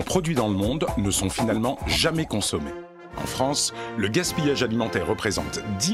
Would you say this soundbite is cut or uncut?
uncut